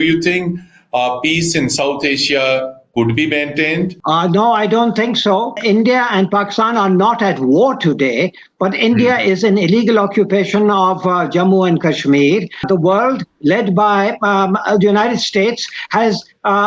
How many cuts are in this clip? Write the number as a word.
two